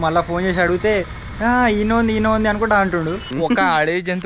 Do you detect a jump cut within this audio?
yes; 1 cut; at 3.3 s

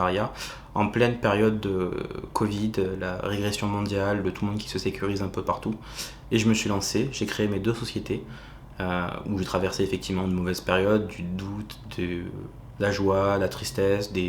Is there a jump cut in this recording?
no; 0 cuts

